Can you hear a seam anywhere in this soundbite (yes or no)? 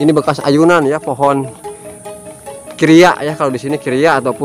no